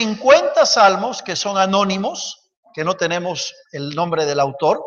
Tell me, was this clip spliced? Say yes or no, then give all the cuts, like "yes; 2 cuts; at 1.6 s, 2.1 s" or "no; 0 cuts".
no; 0 cuts